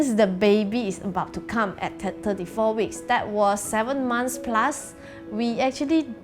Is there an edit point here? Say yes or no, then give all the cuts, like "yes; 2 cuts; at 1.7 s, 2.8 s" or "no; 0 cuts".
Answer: no; 0 cuts